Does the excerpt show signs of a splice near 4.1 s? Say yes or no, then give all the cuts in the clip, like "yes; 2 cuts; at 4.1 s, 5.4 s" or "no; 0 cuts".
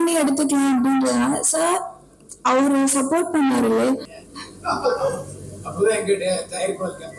yes; 1 cut; at 4.1 s